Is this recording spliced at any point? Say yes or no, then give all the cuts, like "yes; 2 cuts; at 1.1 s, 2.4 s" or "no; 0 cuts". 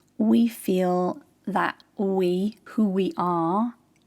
yes; 2 cuts; at 1.8 s, 2.6 s